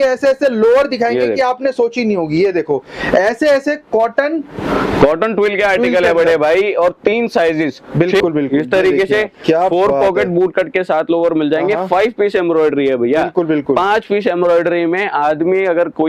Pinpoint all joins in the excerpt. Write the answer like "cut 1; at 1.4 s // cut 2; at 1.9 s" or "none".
cut 1; at 8.2 s